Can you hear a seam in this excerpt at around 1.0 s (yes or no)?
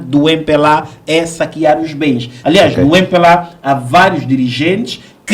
no